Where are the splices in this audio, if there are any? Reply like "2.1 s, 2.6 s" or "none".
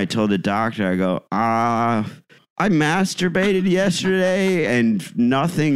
none